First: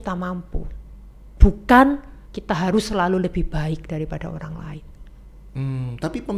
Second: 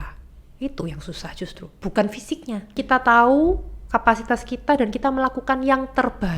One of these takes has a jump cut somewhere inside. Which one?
second; 1 cut; at 2.7 s

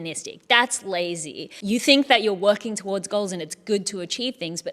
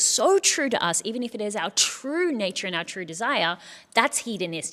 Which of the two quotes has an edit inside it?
first; 1 cut; at 1.5 s

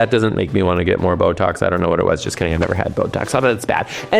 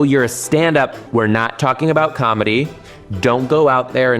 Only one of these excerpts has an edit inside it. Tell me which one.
second; 1 cut; at 1.0 s

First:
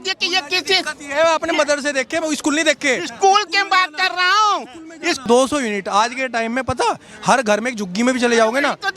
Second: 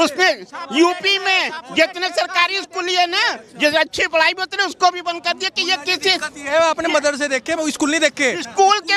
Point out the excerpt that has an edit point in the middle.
first; 1 cut; at 5.2 s

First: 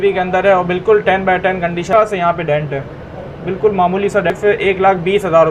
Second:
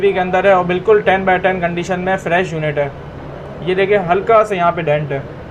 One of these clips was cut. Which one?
first; 2 cuts; at 1.9 s, 4.3 s

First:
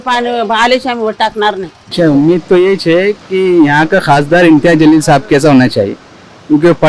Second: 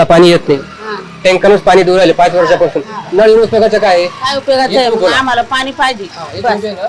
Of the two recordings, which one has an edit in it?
first; 1 cut; at 1.7 s

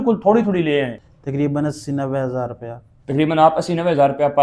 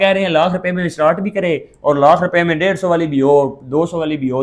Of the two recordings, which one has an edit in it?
first; 1 cut; at 1.0 s

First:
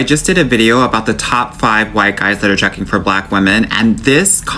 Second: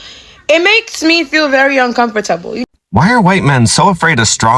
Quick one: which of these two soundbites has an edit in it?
second; 1 cut; at 2.6 s

